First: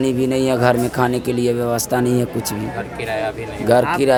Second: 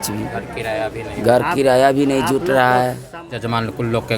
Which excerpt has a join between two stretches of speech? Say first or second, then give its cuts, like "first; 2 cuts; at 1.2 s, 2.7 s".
second; 1 cut; at 3.1 s